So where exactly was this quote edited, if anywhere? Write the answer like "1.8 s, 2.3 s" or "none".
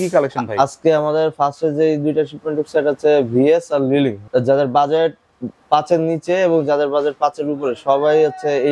4.2 s

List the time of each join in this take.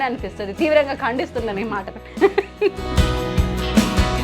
2.8 s

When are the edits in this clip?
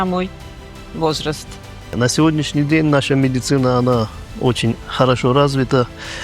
1.9 s

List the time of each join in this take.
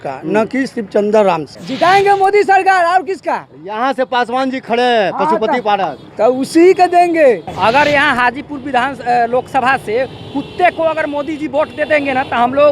1.6 s, 7.5 s

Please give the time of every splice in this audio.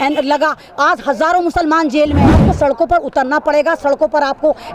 2.4 s

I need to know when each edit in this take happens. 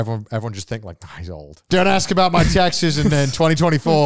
1.7 s

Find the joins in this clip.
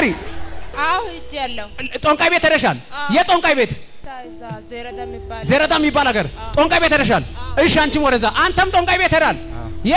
3.9 s

